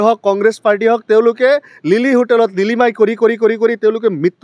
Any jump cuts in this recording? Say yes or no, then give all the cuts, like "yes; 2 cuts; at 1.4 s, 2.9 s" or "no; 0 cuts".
no; 0 cuts